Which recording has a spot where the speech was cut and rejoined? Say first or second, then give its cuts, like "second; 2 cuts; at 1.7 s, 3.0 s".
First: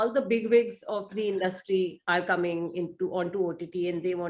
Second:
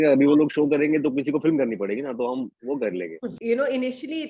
second; 1 cut; at 3.3 s